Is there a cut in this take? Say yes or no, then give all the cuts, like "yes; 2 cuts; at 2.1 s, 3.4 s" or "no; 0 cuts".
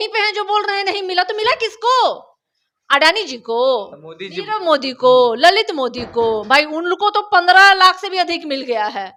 no; 0 cuts